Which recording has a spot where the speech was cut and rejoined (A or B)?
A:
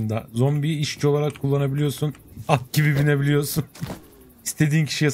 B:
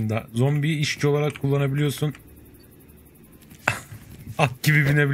A